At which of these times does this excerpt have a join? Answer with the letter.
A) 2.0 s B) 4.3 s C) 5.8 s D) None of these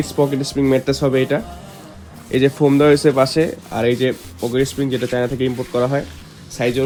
D